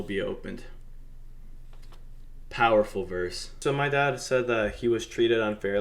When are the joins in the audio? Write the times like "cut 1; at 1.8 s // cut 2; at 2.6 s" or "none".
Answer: cut 1; at 3.6 s